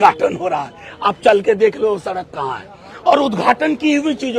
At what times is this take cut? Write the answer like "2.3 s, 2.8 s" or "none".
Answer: none